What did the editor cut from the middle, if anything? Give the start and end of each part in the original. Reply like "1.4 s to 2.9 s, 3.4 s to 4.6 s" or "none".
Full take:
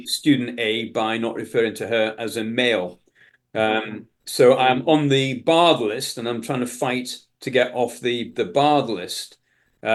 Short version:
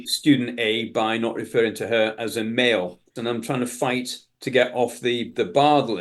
3.1 s to 6.1 s